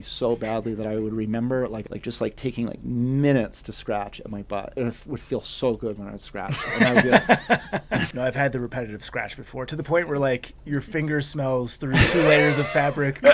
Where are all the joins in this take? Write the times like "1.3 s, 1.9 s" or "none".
1.8 s, 4.7 s, 8.1 s